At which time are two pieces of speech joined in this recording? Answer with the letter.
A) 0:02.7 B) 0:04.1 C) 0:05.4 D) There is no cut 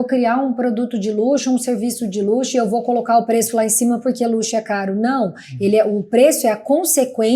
D